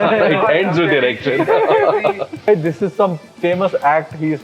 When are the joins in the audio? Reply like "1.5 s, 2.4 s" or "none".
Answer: 2.5 s